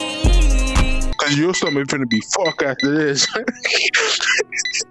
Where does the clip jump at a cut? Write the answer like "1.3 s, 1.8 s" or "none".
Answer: 1.0 s